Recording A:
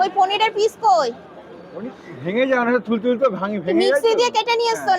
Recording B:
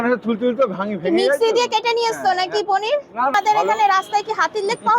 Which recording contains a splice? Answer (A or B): B